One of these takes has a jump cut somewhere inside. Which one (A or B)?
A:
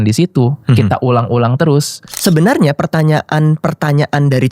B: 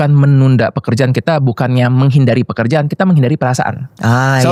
A